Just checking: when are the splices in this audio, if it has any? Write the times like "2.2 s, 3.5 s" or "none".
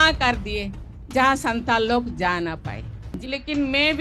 2.9 s

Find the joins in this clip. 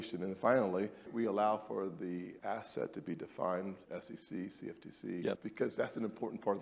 1.1 s, 2.3 s, 3.8 s, 5.5 s

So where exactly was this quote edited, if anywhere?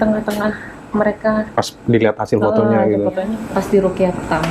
3.3 s

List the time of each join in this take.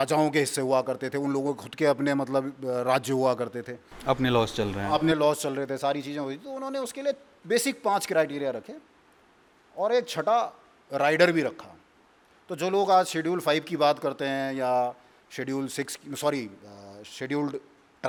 none

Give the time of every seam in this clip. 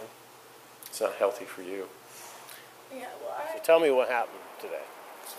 3.5 s

